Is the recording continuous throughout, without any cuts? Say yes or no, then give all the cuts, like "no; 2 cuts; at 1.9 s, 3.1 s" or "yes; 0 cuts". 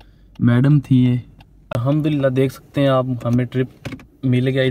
no; 1 cut; at 1.6 s